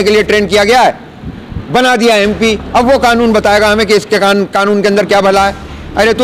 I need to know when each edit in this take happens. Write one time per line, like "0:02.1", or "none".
none